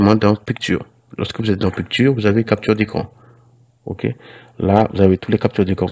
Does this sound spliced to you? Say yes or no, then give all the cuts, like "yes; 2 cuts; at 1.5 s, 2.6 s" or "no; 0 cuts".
no; 0 cuts